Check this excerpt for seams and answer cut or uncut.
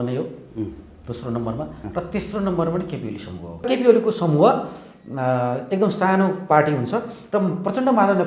cut